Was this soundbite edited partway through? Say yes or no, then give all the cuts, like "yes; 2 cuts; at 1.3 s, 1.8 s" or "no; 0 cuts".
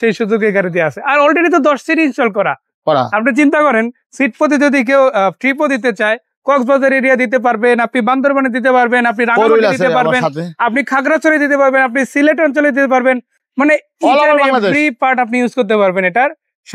no; 0 cuts